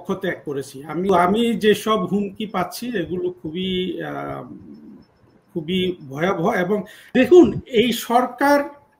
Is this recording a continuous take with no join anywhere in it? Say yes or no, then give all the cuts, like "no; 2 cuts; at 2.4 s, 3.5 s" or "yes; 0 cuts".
no; 2 cuts; at 1.1 s, 7.0 s